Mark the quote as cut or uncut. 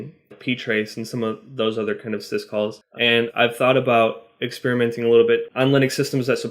cut